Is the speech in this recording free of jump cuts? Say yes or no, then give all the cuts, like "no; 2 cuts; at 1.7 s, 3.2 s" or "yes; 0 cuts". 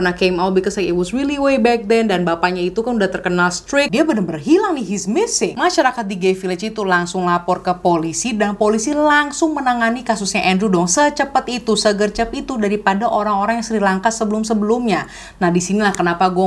no; 1 cut; at 3.9 s